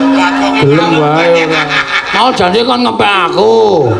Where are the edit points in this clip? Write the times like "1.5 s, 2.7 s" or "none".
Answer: none